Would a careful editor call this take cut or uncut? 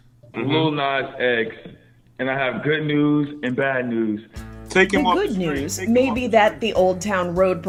uncut